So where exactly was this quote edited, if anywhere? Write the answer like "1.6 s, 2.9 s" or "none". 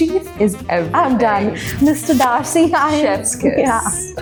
none